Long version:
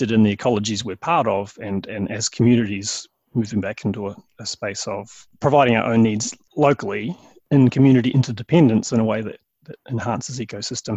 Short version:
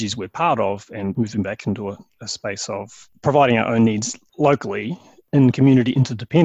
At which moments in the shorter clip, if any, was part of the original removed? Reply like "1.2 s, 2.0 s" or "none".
1.1 s